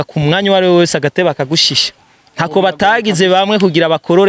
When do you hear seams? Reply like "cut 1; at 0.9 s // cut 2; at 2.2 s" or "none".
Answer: cut 1; at 2.0 s